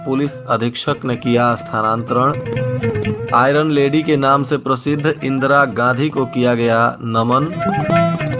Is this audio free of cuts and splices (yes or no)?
yes